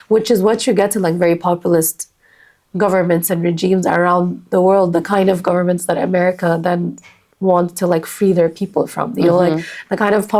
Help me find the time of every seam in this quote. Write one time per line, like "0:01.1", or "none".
none